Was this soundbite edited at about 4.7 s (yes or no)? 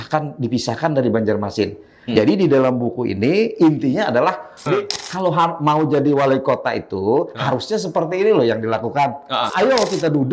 yes